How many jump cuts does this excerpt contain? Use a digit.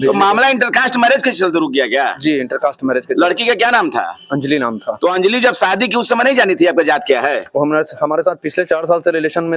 0